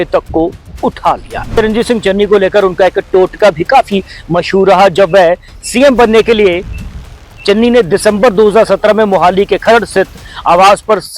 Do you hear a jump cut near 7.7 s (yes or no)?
no